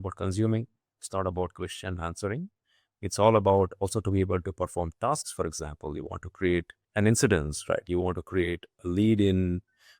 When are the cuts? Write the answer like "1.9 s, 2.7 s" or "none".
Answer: 6.8 s